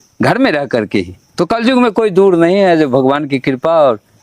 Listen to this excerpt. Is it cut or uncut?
cut